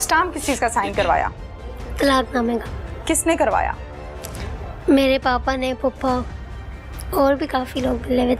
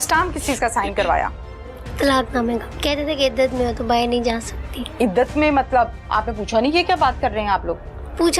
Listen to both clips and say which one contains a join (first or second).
second